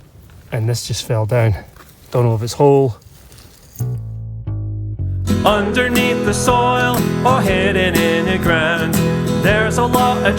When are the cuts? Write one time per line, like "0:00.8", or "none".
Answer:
0:03.6